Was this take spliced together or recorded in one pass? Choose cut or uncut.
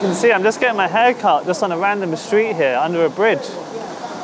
uncut